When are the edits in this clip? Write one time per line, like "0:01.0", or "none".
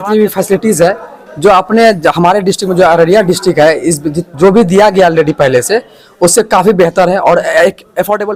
none